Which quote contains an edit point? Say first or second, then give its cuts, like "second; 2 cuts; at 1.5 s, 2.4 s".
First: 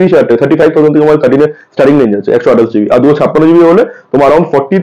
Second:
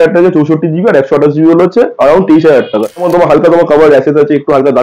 second; 1 cut; at 3.0 s